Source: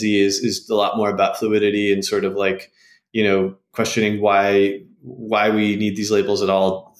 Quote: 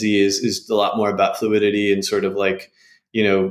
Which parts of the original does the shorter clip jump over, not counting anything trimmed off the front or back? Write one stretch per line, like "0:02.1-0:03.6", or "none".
none